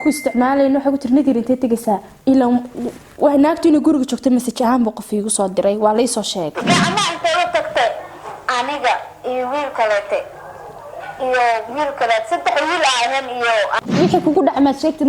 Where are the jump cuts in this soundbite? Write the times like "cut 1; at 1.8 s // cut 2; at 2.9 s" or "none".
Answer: cut 1; at 6.6 s // cut 2; at 13.8 s

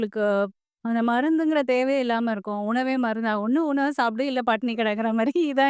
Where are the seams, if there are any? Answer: none

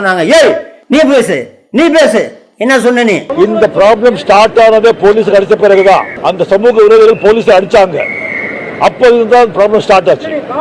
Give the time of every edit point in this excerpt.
none

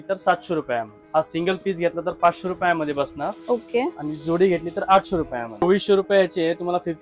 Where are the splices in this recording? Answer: cut 1; at 1.0 s // cut 2; at 5.6 s

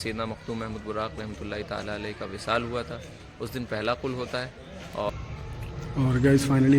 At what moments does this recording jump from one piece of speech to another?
cut 1; at 5.1 s

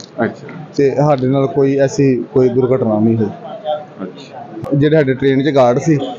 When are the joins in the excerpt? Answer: cut 1; at 4.6 s

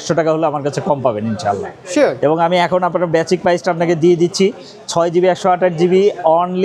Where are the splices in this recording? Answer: none

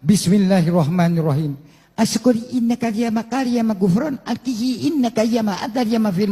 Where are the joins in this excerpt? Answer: none

